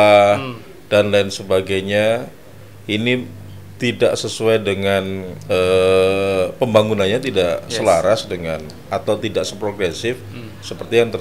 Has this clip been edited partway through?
no; 0 cuts

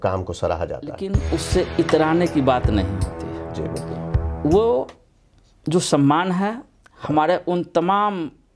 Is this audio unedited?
no; 1 cut; at 1.2 s

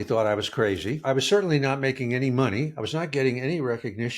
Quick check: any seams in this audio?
yes; 1 cut; at 1.0 s

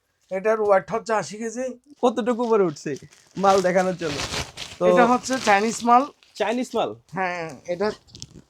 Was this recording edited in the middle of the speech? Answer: yes; 1 cut; at 1.9 s

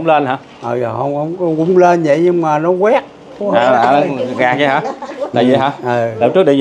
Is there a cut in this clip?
no; 0 cuts

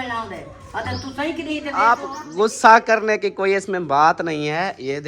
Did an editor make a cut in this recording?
yes; 1 cut; at 1.7 s

